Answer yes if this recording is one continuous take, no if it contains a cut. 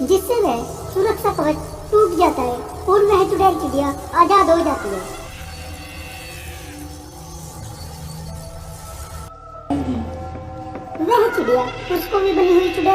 no